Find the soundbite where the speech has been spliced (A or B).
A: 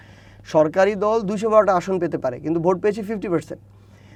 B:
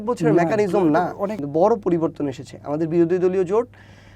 B